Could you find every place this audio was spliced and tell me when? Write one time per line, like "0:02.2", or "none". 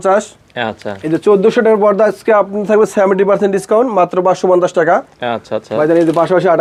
none